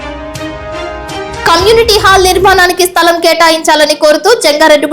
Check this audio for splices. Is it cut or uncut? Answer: cut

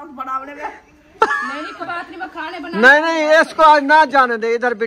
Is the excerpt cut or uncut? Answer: cut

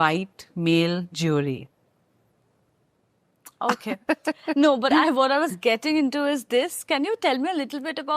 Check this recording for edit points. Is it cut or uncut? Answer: uncut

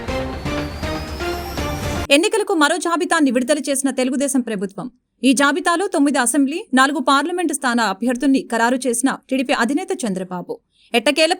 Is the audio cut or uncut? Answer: cut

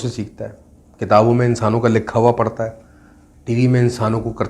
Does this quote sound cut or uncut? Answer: uncut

